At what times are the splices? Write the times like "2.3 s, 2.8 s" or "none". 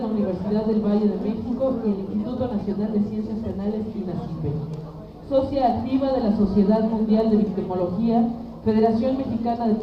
none